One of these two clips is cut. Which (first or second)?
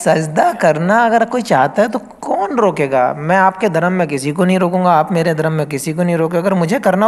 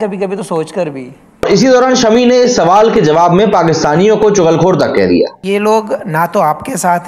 second